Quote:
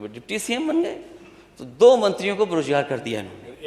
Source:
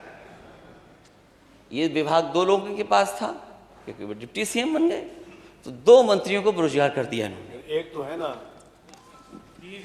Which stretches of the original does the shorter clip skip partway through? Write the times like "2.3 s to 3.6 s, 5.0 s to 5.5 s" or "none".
none